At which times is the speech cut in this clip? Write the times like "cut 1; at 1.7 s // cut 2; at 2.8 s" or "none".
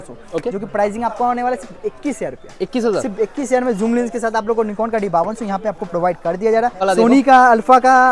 cut 1; at 6.8 s